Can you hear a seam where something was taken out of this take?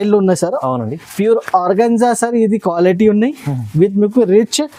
no; 0 cuts

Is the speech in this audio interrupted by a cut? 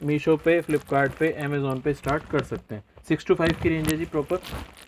no; 0 cuts

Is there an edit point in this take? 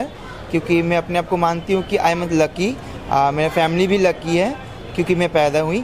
no; 0 cuts

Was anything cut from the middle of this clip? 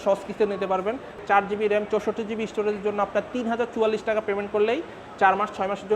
yes; 1 cut; at 1.2 s

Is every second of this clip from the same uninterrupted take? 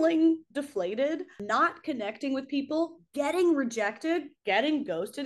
no; 1 cut; at 1.4 s

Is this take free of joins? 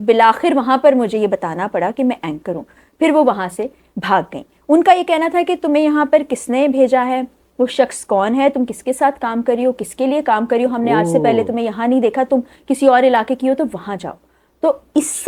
yes; 0 cuts

